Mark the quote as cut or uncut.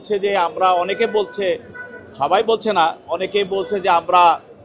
uncut